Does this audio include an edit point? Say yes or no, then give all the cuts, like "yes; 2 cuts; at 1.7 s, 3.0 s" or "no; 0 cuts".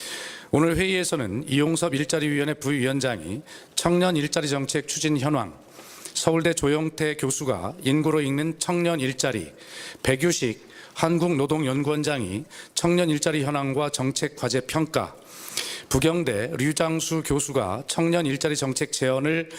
no; 0 cuts